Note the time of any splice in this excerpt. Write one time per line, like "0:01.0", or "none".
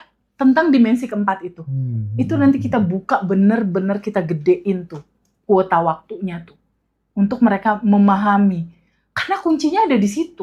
none